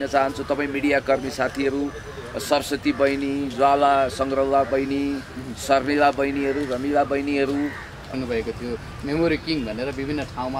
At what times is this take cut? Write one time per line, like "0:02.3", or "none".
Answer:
0:08.1